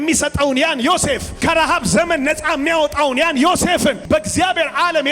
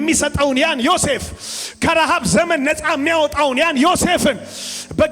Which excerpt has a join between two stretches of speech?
first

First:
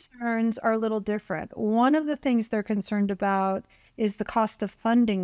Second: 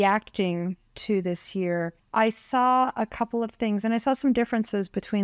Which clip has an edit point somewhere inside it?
second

